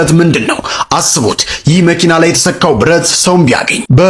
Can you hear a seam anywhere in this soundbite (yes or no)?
no